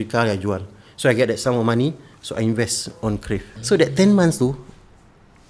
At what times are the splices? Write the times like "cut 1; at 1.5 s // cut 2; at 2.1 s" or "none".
cut 1; at 3.5 s

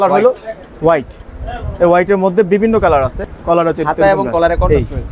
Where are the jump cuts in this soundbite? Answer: cut 1; at 3.3 s

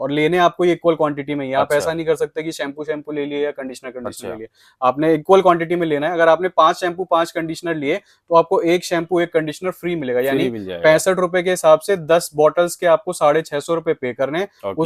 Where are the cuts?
none

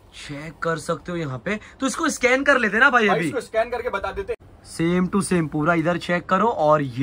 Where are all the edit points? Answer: cut 1; at 4.4 s

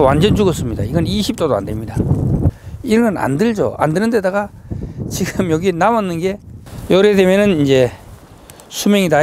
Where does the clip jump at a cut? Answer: none

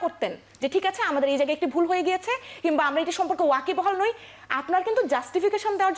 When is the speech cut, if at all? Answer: none

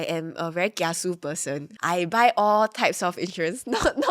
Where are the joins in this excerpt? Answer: cut 1; at 1.6 s

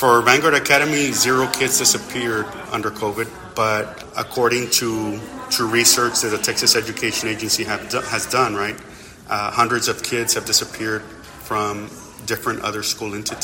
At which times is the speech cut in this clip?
cut 1; at 2.6 s // cut 2; at 4.0 s

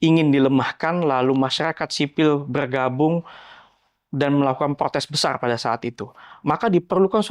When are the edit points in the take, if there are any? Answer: none

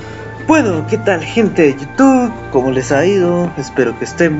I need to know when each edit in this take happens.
none

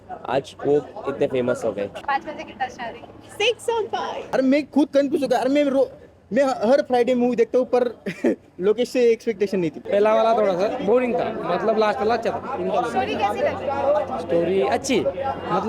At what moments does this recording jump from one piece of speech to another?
cut 1; at 2.0 s // cut 2; at 4.1 s // cut 3; at 9.8 s

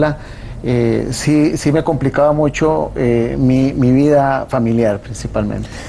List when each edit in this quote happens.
cut 1; at 4.0 s

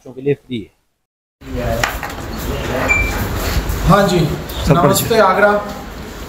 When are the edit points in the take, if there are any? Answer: none

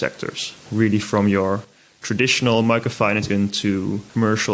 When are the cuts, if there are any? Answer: cut 1; at 3.2 s

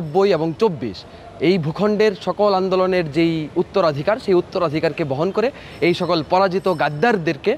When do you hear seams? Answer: none

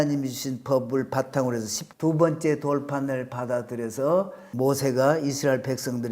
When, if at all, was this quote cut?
cut 1; at 1.8 s // cut 2; at 4.4 s

